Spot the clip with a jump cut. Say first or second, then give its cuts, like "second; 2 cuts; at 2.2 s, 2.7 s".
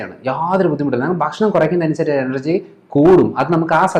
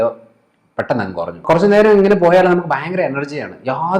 second; 1 cut; at 1.4 s